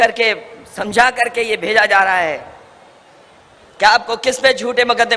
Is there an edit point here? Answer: no; 0 cuts

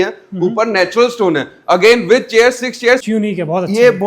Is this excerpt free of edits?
no; 1 cut; at 3.0 s

